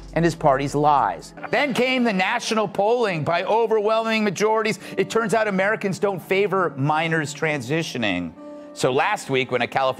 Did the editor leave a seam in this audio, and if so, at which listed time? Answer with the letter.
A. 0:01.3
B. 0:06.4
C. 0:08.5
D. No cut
A